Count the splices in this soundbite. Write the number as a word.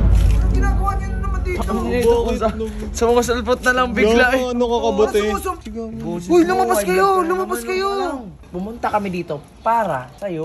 two